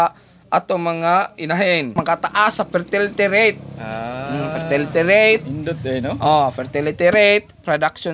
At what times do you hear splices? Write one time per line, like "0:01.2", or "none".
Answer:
0:01.9